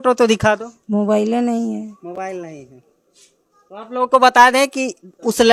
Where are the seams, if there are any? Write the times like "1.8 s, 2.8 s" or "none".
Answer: none